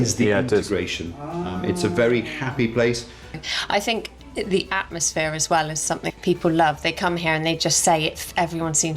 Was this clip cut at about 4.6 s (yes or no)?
no